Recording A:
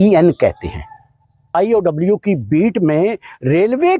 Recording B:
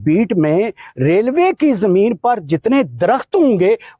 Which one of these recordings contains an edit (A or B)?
A